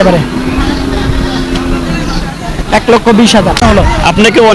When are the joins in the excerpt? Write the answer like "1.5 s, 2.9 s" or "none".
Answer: 3.6 s